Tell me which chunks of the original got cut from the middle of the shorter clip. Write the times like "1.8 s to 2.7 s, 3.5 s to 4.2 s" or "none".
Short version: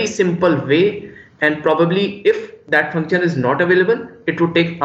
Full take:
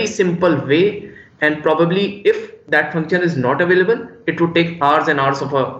none

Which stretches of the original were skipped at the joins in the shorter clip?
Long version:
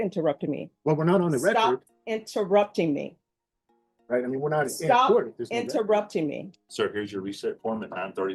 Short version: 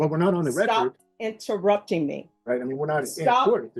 3.2 s to 3.9 s

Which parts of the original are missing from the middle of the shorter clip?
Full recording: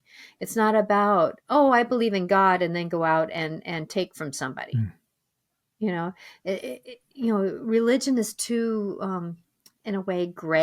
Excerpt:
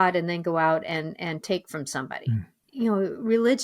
5.0 s to 7.0 s

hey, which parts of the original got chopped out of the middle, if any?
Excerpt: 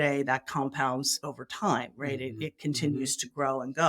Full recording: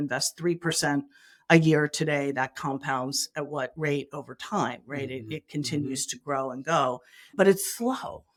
3.3 s to 4.1 s

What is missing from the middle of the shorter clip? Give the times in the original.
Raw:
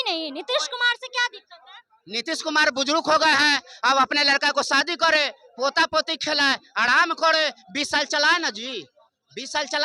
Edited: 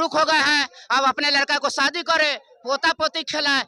none

